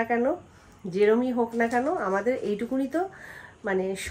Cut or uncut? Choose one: uncut